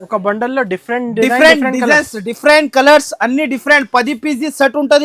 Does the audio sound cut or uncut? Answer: uncut